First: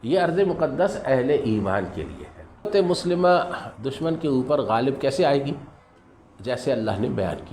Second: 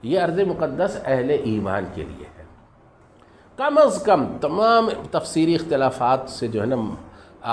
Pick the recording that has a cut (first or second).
first